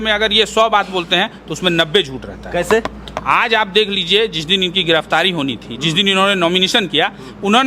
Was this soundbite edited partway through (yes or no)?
no